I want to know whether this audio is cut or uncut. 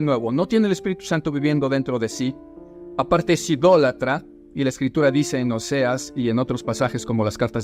uncut